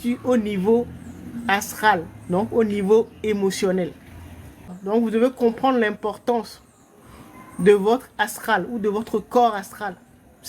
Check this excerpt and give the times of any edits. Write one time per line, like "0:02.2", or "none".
0:04.8